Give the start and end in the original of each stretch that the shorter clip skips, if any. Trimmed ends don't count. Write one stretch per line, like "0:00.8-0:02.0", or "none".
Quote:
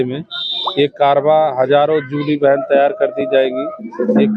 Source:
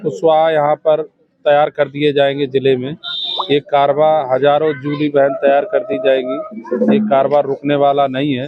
none